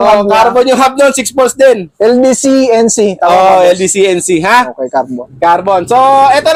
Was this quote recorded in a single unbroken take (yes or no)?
yes